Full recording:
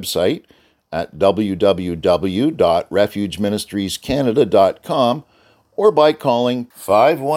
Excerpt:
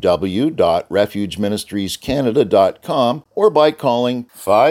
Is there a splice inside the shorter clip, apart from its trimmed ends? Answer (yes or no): yes